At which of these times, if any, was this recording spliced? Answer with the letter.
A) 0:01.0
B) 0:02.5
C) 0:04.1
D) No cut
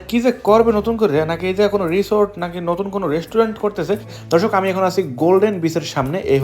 C